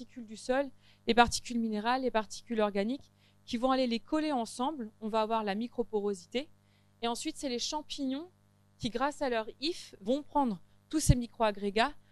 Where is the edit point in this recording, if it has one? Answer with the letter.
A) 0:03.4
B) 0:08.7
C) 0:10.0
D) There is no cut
C